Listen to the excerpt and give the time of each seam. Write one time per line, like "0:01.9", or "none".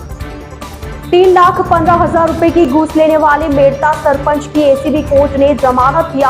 0:01.1